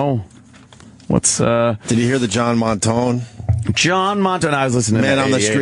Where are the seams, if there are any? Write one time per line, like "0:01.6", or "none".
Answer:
none